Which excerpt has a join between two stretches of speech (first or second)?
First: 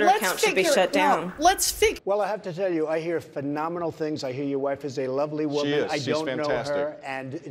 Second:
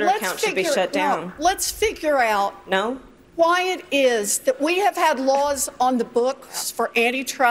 first